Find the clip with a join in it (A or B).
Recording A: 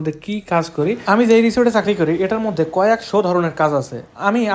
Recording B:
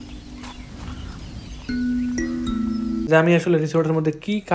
B